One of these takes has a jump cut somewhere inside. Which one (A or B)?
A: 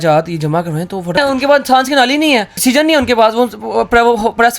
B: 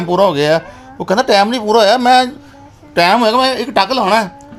A